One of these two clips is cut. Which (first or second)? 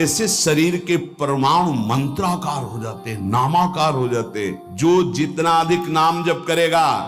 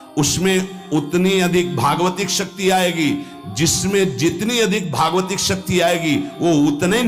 first